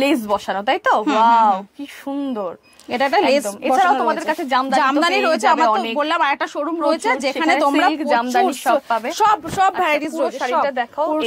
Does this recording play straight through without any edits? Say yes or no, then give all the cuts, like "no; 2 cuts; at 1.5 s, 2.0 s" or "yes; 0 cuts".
yes; 0 cuts